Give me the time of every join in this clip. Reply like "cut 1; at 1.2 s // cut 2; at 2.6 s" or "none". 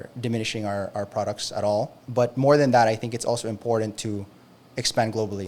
cut 1; at 2.0 s